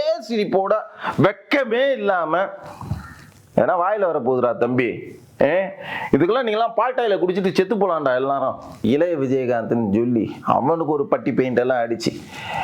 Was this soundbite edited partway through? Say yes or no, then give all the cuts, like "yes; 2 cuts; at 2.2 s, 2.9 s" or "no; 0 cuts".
yes; 1 cut; at 8.9 s